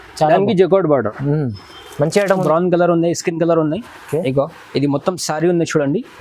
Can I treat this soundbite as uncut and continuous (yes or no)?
no